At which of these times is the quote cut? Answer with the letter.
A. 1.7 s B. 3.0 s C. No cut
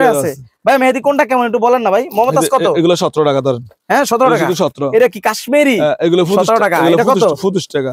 C